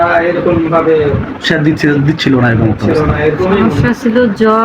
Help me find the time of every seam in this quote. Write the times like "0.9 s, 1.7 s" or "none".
3.6 s